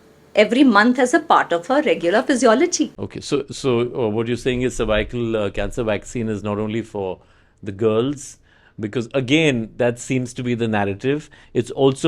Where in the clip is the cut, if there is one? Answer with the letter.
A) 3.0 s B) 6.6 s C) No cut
A